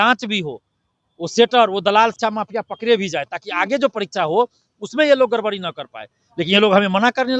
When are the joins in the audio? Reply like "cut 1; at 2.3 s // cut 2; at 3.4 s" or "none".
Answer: none